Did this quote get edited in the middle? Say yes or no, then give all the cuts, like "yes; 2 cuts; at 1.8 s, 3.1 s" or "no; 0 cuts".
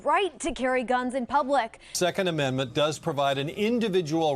yes; 1 cut; at 1.9 s